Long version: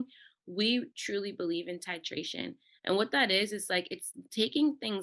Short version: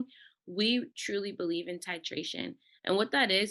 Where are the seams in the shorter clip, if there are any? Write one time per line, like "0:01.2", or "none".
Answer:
none